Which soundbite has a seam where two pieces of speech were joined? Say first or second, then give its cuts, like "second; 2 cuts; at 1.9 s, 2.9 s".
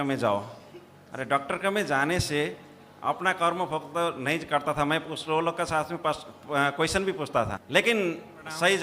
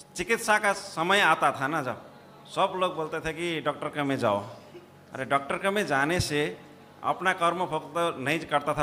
first; 1 cut; at 7.6 s